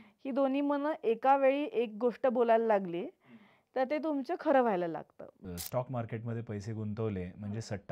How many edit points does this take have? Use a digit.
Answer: 1